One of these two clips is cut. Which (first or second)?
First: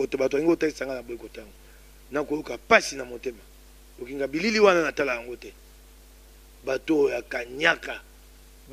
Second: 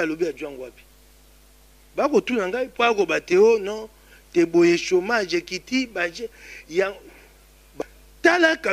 second